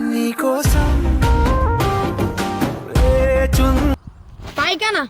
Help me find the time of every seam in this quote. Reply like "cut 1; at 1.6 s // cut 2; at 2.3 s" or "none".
cut 1; at 4.0 s